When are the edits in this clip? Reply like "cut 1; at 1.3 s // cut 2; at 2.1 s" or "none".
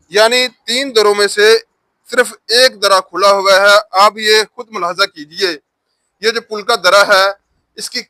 none